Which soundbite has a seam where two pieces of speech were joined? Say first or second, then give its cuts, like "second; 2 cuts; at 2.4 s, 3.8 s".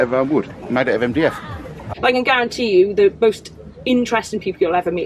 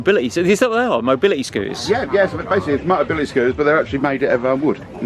first; 1 cut; at 1.9 s